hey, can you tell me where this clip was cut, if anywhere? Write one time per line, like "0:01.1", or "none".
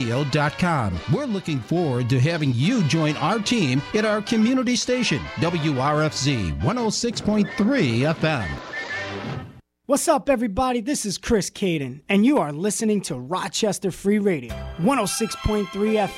0:09.8